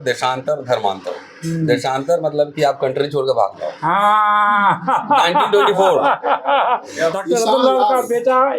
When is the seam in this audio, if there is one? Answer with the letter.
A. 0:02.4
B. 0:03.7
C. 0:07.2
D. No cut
C